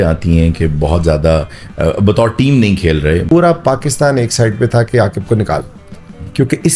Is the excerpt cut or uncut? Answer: cut